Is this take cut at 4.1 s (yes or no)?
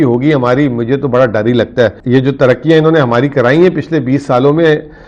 no